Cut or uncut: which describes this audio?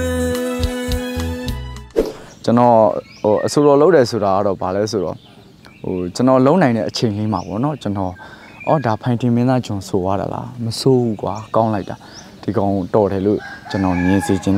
uncut